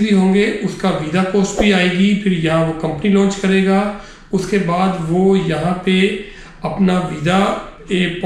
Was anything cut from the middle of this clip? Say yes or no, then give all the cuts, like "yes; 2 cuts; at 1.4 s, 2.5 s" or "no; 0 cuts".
no; 0 cuts